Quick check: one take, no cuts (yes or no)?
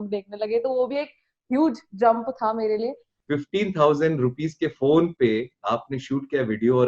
no